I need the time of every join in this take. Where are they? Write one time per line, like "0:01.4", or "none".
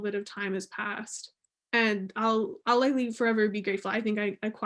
0:01.5